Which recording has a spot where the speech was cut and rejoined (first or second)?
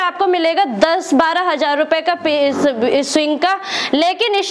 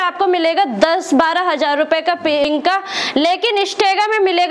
second